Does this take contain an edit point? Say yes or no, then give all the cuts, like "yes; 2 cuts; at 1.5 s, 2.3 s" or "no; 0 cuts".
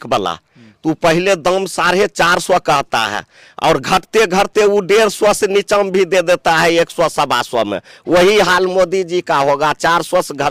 no; 0 cuts